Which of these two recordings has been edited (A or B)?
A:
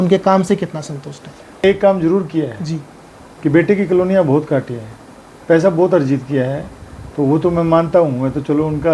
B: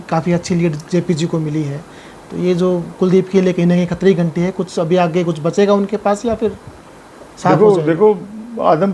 A